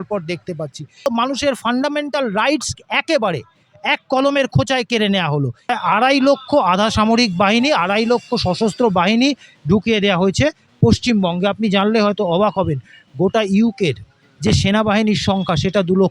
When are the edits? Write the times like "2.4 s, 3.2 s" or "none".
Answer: 1.1 s, 5.7 s